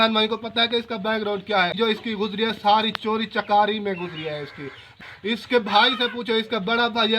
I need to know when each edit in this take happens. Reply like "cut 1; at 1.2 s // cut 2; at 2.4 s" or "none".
cut 1; at 1.7 s // cut 2; at 4.9 s